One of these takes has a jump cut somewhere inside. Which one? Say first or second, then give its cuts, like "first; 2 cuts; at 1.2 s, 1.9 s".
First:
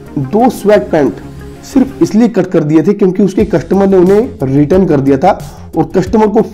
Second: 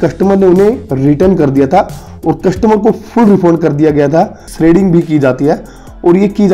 second; 1 cut; at 4.5 s